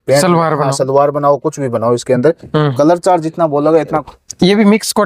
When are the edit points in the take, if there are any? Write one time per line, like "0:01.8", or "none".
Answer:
0:04.0